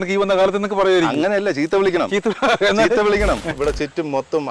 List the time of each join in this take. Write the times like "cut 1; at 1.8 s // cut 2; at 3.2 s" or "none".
cut 1; at 3.5 s